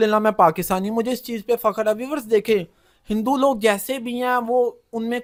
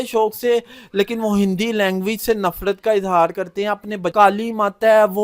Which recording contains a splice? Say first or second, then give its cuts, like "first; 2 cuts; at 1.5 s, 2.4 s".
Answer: second; 1 cut; at 4.1 s